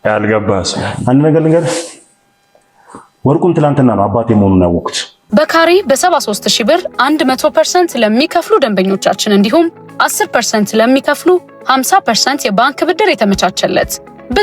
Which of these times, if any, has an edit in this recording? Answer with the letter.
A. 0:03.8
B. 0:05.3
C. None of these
B